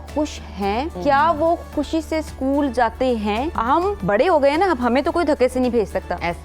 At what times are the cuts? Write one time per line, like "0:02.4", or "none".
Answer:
0:00.9
0:03.7